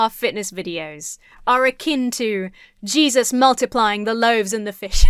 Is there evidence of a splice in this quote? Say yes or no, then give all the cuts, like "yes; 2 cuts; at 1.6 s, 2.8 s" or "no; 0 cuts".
no; 0 cuts